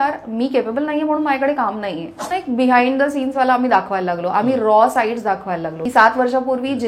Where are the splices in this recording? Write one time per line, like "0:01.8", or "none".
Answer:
0:02.3
0:05.7